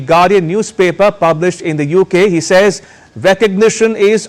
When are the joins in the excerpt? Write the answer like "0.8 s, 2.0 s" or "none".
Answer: none